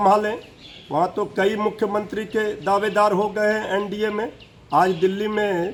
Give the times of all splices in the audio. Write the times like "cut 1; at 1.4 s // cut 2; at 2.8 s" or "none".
none